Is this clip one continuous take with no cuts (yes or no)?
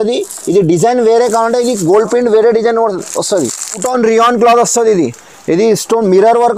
no